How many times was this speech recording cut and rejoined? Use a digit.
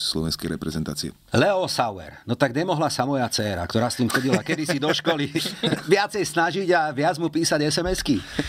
1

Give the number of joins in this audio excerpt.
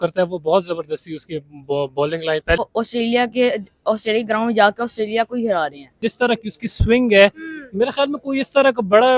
2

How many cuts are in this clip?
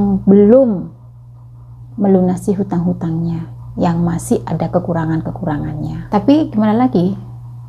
1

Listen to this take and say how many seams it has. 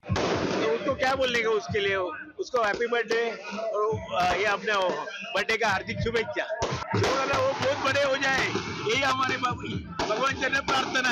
1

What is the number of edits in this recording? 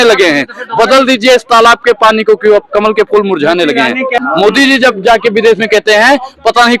1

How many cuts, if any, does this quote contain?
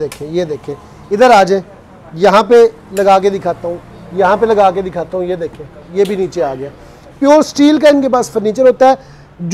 0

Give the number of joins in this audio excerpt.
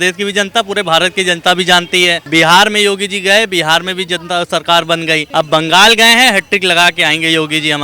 2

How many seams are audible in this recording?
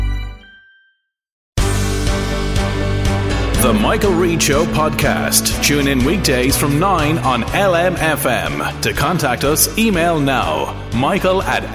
1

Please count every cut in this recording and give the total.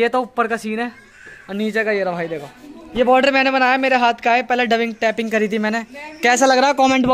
0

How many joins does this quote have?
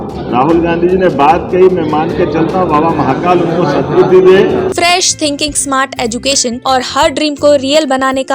2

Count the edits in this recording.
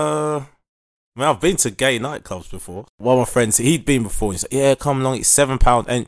1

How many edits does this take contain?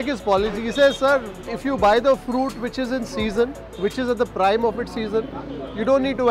1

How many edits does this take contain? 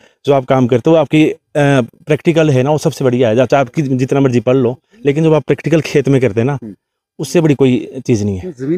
0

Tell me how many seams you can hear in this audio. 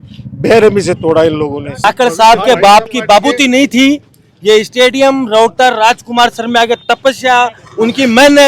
1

